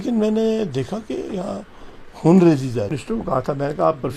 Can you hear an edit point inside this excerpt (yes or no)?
yes